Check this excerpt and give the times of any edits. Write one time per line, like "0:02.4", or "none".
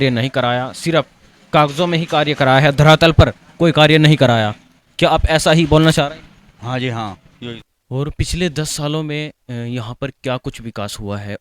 0:07.7